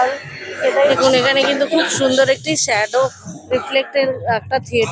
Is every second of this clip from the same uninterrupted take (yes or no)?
no